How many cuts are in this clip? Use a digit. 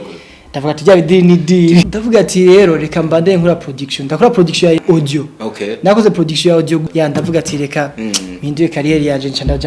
3